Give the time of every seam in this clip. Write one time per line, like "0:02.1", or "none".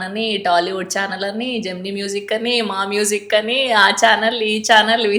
none